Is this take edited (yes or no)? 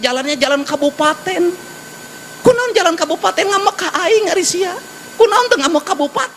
no